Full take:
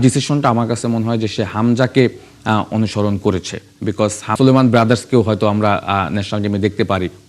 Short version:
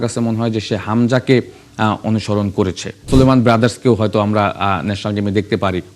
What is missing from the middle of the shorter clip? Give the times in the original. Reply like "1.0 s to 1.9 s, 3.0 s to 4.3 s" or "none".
3.7 s to 4.3 s